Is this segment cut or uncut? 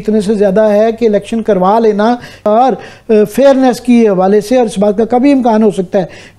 cut